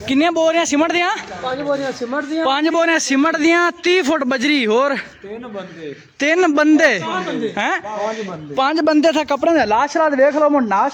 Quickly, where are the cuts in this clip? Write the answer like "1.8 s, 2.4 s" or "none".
none